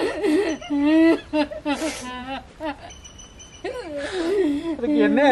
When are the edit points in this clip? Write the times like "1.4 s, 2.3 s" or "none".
none